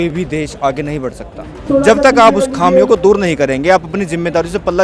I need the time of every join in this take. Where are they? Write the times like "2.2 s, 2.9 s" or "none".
1.6 s